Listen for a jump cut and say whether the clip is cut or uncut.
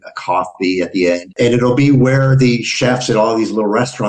cut